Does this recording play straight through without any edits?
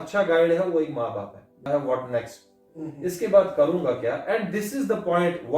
no; 1 cut; at 1.7 s

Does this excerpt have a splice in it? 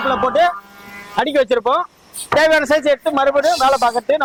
no; 0 cuts

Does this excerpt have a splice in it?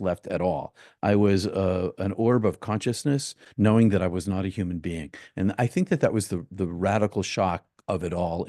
yes; 1 cut; at 3.4 s

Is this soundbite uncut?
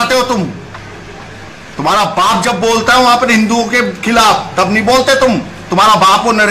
yes; 0 cuts

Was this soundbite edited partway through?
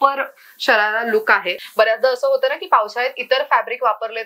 yes; 1 cut; at 1.6 s

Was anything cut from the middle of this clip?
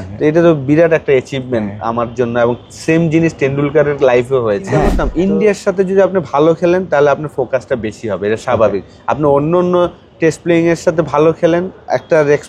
yes; 1 cut; at 5.1 s

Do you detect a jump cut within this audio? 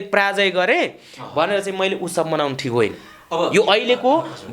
no; 0 cuts

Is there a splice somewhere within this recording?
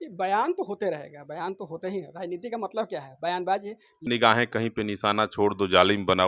yes; 1 cut; at 4.0 s

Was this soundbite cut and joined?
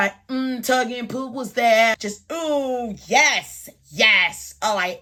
no; 0 cuts

